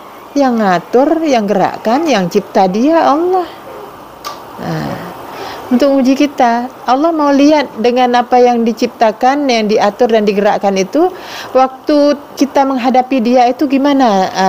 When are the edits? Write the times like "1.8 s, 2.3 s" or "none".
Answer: 12.3 s